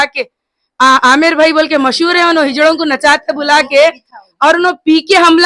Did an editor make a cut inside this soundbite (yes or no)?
no